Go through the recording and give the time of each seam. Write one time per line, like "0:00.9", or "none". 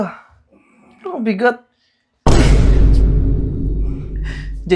none